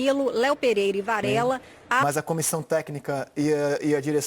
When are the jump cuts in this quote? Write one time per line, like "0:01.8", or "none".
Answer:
0:02.0